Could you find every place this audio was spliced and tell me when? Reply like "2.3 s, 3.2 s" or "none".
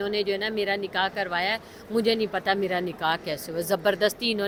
none